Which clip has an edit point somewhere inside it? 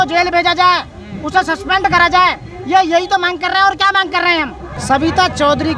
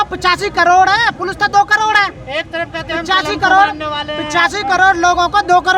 first; 1 cut; at 4.6 s

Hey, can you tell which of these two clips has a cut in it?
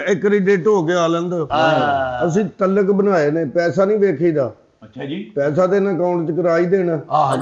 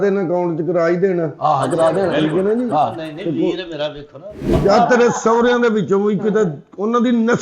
second; 1 cut; at 4.5 s

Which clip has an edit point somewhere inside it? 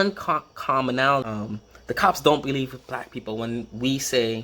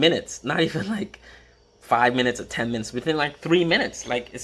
first; 1 cut; at 1.3 s

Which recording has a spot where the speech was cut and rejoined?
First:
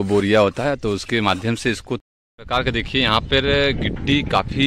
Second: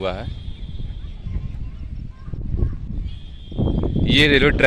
first; 1 cut; at 2.0 s

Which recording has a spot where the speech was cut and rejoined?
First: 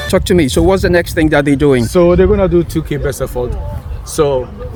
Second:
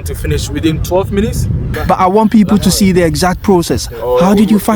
second; 1 cut; at 1.7 s

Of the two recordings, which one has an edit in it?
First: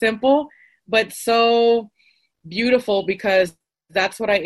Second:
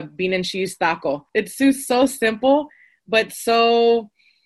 second; 1 cut; at 1.2 s

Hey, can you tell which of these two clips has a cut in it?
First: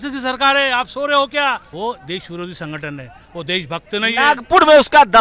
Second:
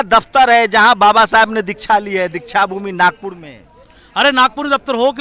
first; 1 cut; at 1.7 s

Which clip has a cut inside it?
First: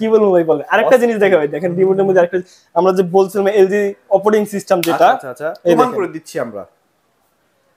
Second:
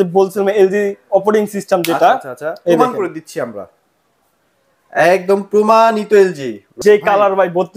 second; 1 cut; at 6.7 s

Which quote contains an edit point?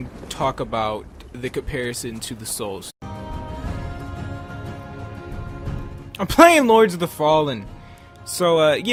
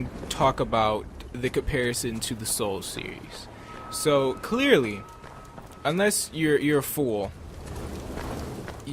second; 1 cut; at 2.9 s

